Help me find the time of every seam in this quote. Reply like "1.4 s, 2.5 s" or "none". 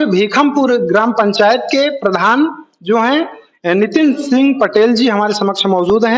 none